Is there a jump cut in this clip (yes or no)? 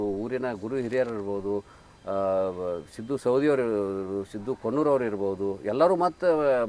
no